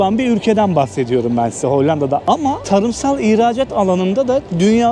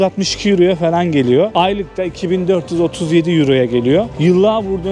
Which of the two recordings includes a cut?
second; 2 cuts; at 1.5 s, 4.1 s

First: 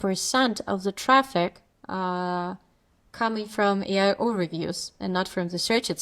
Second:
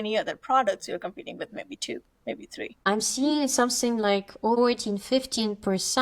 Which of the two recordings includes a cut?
second; 2 cuts; at 2.8 s, 4.6 s

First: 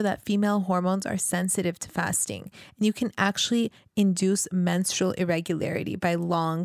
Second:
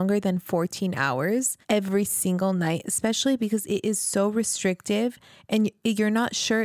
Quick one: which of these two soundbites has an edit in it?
second; 1 cut; at 1.6 s

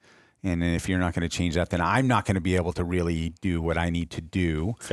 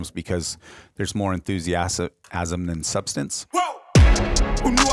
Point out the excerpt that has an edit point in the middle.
second; 1 cut; at 3.4 s

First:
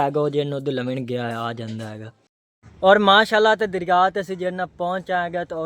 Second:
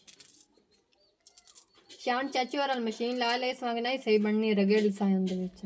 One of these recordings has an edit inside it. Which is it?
first; 1 cut; at 2.4 s

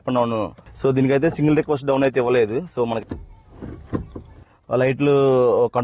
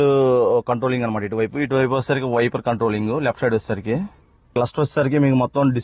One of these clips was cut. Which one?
first; 1 cut; at 3.0 s

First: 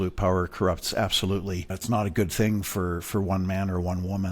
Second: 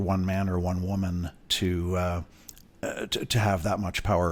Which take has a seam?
first; 1 cut; at 1.7 s

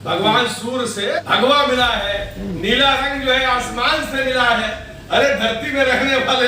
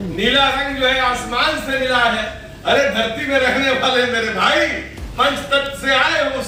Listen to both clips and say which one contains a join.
first; 1 cut; at 1.1 s

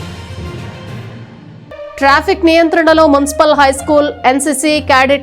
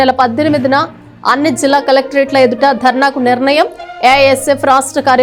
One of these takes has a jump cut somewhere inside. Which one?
first; 1 cut; at 1.9 s

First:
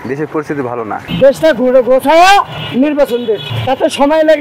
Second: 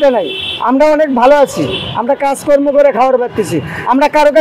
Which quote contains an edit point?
first; 3 cuts; at 1.0 s, 2.6 s, 3.5 s

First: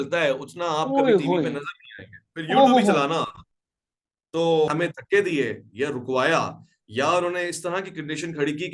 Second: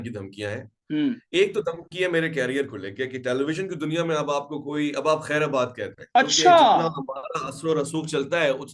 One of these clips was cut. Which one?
first; 1 cut; at 4.7 s

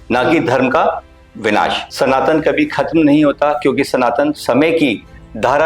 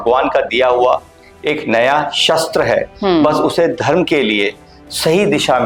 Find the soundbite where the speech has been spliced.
first; 1 cut; at 1.8 s

